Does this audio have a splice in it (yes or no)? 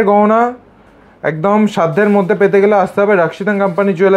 no